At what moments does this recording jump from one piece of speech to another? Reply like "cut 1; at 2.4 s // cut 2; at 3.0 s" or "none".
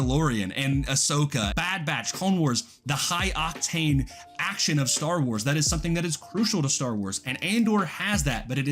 cut 1; at 1.4 s